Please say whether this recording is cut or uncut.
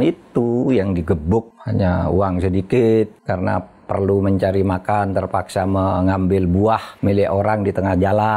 cut